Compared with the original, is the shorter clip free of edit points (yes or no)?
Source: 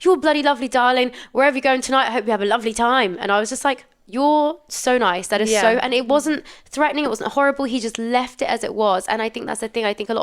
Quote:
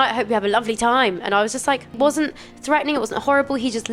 no